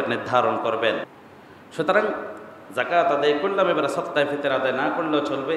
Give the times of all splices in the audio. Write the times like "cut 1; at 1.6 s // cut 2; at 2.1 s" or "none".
cut 1; at 1.2 s